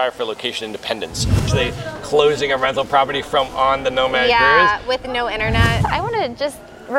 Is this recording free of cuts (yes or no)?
no